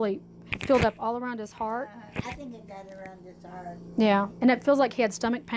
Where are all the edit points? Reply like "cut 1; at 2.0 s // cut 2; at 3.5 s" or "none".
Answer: none